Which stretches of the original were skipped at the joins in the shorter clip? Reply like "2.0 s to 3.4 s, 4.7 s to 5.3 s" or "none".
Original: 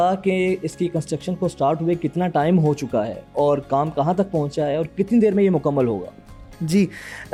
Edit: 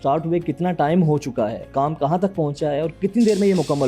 3.2 s to 3.6 s